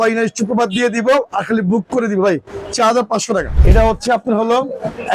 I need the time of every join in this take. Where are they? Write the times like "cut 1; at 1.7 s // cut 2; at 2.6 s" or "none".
cut 1; at 3.6 s